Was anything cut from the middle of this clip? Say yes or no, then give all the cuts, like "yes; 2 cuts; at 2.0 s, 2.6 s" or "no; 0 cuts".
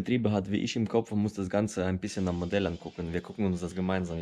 no; 0 cuts